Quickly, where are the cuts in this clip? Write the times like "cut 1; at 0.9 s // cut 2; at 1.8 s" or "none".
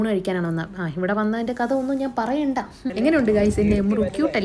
cut 1; at 2.8 s

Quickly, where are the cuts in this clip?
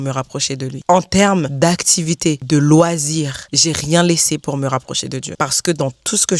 none

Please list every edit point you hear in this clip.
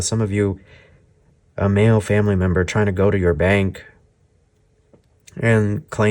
none

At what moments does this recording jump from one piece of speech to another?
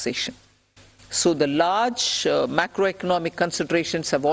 none

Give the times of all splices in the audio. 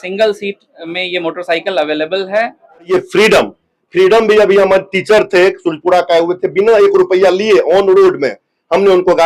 cut 1; at 2.9 s

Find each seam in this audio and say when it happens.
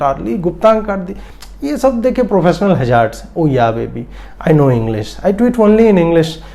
none

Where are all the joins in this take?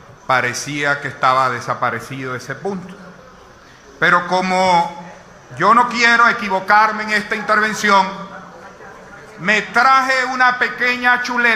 none

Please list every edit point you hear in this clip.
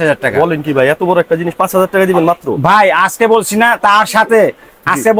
none

